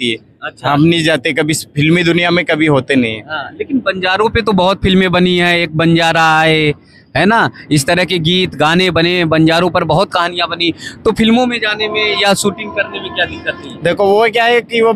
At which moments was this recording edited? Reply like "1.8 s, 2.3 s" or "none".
none